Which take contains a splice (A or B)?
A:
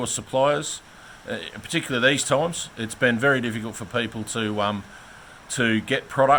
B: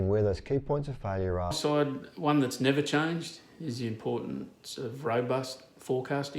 B